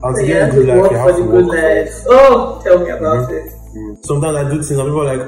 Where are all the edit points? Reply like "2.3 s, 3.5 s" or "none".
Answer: 4.0 s